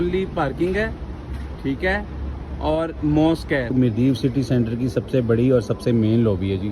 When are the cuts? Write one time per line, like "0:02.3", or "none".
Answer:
0:03.7